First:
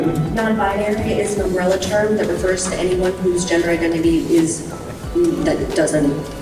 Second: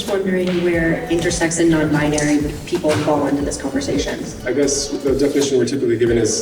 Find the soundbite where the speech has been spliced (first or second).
second